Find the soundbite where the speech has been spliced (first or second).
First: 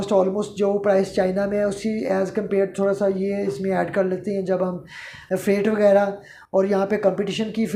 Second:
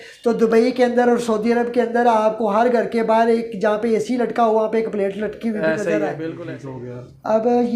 second